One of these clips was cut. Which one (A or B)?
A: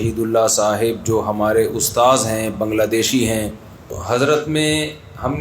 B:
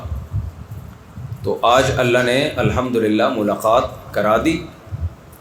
A